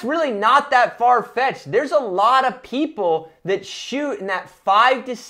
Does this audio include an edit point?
no; 0 cuts

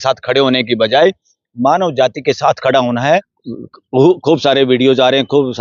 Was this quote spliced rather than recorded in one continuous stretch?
yes; 1 cut; at 3.4 s

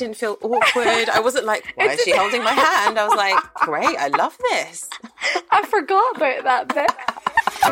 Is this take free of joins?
yes; 0 cuts

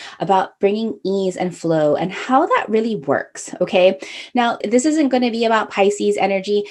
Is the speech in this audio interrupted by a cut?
yes; 1 cut; at 4.6 s

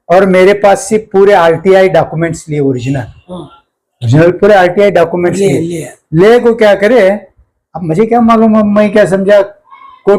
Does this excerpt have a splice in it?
no; 0 cuts

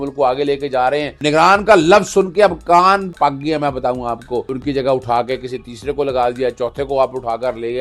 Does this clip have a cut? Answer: yes; 3 cuts; at 1.2 s, 3.1 s, 4.5 s

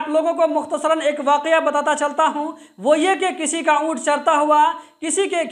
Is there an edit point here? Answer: no; 0 cuts

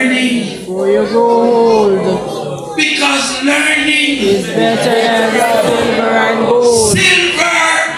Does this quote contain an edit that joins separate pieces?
no; 0 cuts

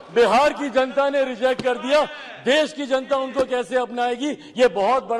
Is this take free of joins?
yes; 0 cuts

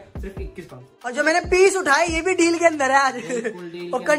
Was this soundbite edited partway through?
yes; 1 cut; at 1.1 s

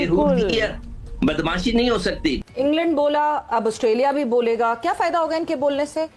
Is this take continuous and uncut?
no; 1 cut; at 2.4 s

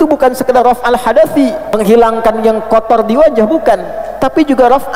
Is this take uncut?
no; 1 cut; at 1.7 s

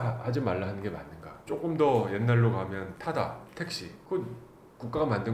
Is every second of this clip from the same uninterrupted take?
yes; 0 cuts

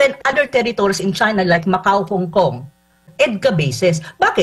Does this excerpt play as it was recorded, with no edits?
no; 1 cut; at 3.1 s

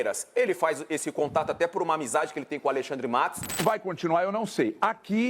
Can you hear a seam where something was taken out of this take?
yes; 1 cut; at 3.6 s

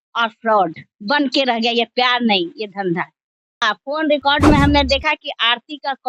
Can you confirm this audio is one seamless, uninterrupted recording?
no; 1 cut; at 3.4 s

